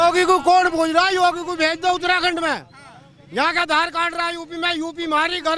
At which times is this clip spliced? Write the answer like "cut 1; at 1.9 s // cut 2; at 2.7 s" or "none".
none